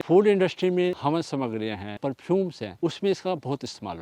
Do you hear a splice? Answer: yes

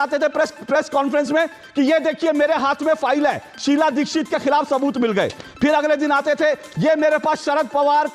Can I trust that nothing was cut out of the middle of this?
yes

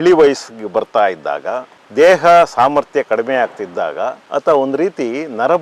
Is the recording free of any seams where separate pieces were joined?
no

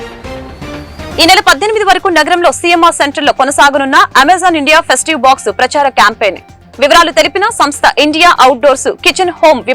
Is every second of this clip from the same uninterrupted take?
no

